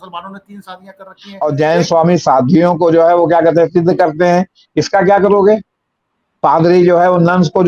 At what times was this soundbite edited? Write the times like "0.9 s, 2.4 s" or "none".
1.2 s